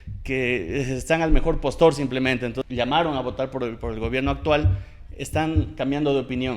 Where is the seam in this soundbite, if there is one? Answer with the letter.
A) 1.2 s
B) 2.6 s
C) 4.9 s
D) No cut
B